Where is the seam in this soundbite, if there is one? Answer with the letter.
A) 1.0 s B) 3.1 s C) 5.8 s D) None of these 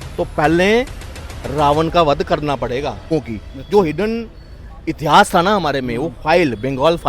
B